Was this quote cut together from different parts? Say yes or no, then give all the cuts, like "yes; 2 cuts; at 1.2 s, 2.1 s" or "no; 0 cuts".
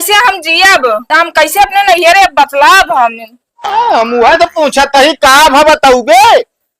yes; 1 cut; at 1.0 s